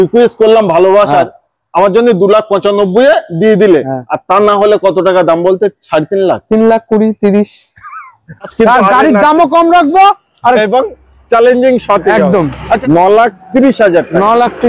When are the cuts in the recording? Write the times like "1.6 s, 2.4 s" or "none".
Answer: 8.5 s, 12.8 s